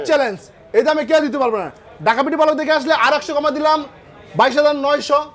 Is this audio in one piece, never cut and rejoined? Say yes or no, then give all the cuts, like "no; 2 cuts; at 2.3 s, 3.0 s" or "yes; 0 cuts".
yes; 0 cuts